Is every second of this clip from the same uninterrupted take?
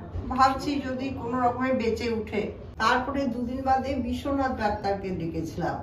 no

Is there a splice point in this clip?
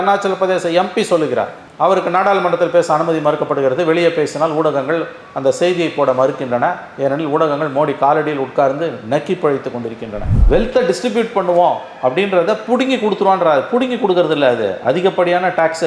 yes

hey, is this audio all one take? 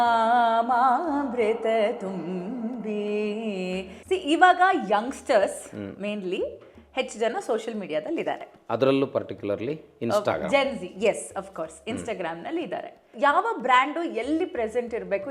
no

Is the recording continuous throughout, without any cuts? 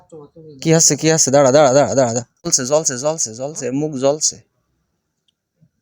no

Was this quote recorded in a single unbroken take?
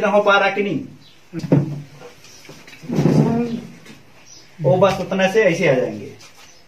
no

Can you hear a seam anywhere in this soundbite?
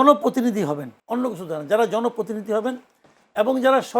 yes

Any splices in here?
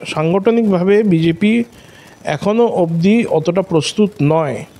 no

